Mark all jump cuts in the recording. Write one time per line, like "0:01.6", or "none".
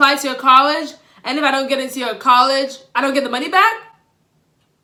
none